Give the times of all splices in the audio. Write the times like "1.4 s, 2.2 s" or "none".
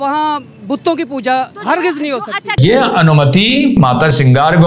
2.6 s, 3.8 s